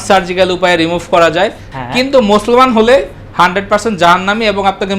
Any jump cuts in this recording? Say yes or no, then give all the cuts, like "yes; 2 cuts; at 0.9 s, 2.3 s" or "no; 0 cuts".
yes; 1 cut; at 1.7 s